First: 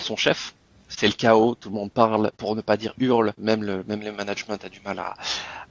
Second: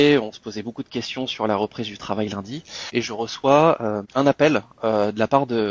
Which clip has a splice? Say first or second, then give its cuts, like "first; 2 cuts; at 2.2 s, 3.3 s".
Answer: first; 2 cuts; at 0.9 s, 2.4 s